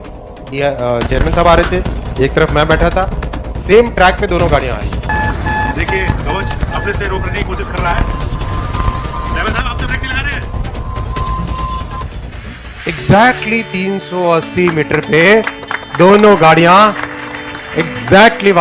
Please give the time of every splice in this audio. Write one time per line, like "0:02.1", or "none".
none